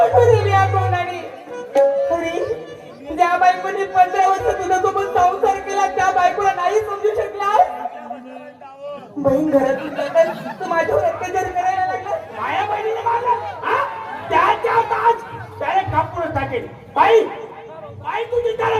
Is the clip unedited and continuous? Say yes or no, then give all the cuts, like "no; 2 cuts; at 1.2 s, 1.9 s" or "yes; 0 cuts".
no; 1 cut; at 12.3 s